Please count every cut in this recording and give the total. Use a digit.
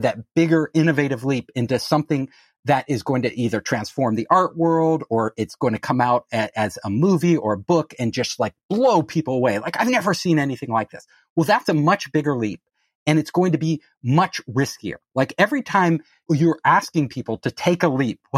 1